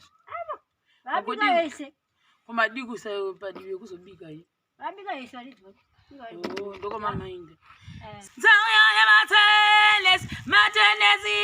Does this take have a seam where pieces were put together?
yes; 1 cut; at 8.1 s

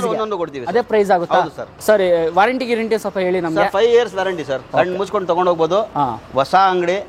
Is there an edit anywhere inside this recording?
no; 0 cuts

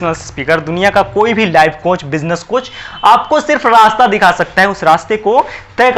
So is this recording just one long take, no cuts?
yes; 0 cuts

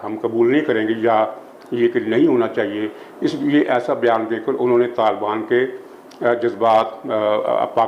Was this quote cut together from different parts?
no; 0 cuts

